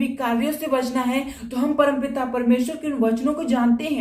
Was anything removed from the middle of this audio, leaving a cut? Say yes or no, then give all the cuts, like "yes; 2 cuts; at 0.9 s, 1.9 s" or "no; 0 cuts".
no; 0 cuts